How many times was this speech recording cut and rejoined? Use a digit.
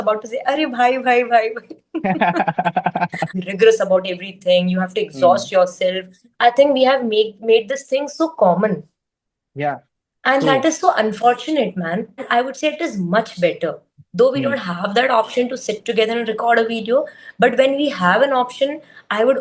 2